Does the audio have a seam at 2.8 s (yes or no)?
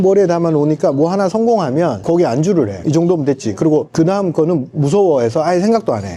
yes